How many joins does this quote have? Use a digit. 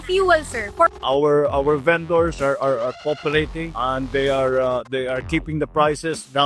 1